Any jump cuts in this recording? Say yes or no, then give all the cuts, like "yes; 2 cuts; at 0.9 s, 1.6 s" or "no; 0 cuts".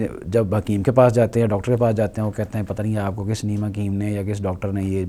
no; 0 cuts